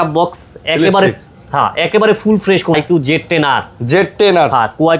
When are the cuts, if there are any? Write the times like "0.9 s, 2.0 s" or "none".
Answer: 2.7 s